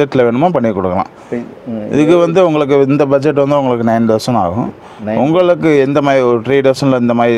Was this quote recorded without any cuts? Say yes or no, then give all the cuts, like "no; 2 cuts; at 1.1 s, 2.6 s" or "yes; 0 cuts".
yes; 0 cuts